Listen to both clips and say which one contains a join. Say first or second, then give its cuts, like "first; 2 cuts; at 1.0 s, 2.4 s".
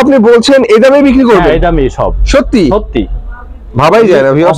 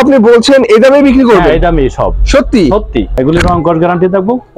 second; 1 cut; at 3.1 s